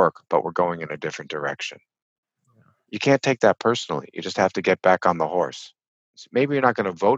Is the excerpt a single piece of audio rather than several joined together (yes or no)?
no